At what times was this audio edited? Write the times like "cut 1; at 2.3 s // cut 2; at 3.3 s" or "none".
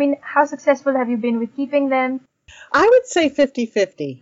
none